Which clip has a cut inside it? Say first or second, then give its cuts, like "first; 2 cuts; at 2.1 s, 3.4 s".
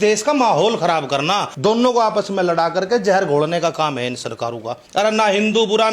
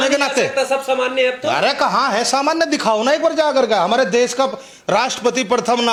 first; 2 cuts; at 1.5 s, 4.8 s